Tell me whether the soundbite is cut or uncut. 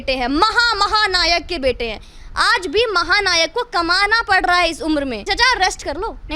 cut